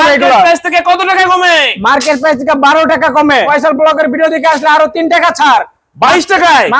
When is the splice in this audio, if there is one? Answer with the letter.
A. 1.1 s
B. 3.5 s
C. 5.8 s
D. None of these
B